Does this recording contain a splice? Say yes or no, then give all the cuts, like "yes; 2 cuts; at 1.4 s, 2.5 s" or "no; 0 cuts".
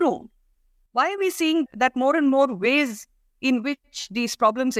no; 0 cuts